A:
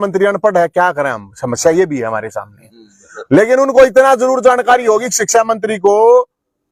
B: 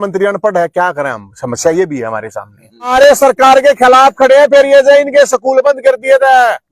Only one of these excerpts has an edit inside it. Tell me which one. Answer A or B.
B